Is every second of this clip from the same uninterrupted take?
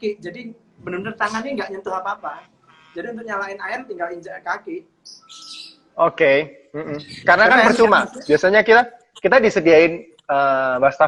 yes; 0 cuts

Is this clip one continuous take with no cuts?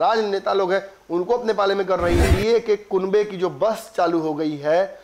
no; 1 cut; at 2.2 s

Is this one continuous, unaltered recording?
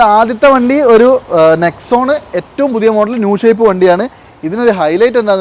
yes; 0 cuts

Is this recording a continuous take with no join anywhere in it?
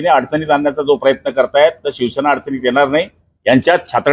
yes; 0 cuts

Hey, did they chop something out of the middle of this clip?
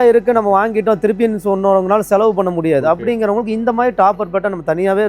no; 0 cuts

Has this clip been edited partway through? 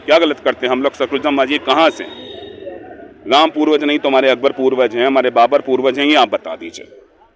no; 0 cuts

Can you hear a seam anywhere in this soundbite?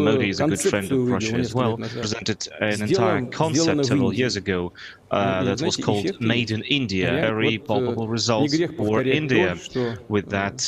yes; 2 cuts; at 2.1 s, 7.2 s

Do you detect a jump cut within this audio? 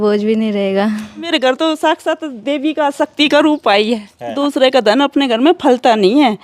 yes; 2 cuts; at 1.3 s, 4.3 s

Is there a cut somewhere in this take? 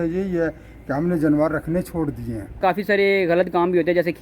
yes; 1 cut; at 2.6 s

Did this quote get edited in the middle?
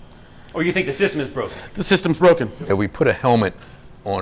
yes; 1 cut; at 2.6 s

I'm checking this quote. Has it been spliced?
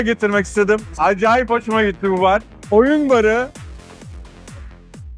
yes; 2 cuts; at 2.5 s, 3.5 s

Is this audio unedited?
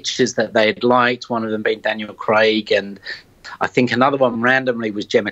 yes; 0 cuts

